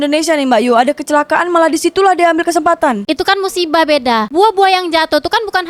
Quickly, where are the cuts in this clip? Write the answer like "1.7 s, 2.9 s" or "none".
none